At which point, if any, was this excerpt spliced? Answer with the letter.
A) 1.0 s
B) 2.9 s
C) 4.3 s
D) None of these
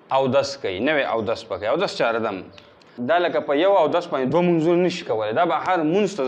B